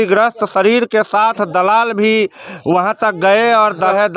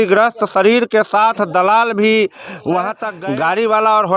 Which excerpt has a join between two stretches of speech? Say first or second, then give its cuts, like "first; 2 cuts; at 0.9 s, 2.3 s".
second; 1 cut; at 3.1 s